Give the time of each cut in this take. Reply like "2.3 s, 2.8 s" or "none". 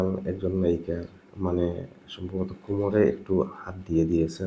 none